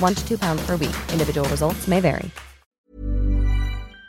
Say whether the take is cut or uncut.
cut